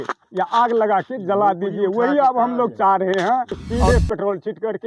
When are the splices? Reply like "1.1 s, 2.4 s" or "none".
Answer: 3.7 s